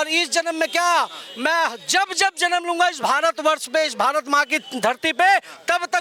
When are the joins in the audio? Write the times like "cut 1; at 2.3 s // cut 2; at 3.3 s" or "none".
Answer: none